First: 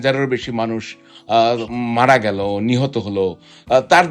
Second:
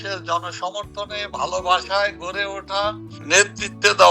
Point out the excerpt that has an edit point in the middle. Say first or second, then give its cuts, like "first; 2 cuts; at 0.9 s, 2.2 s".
second; 1 cut; at 3.1 s